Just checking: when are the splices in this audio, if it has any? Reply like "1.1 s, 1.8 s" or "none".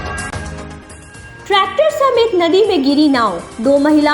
1.0 s